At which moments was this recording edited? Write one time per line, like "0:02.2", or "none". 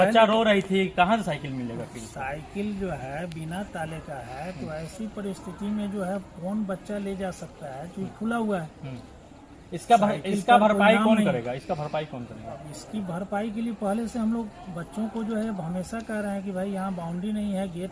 none